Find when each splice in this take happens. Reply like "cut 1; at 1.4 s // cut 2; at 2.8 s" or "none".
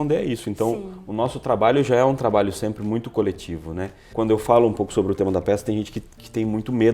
cut 1; at 4.0 s